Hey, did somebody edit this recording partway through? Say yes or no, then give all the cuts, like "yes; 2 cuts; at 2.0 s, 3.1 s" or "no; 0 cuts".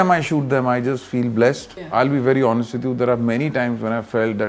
yes; 1 cut; at 1.7 s